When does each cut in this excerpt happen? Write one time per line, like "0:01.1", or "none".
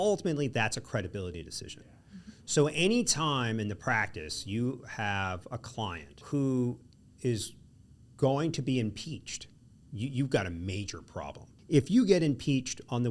0:06.2
0:11.5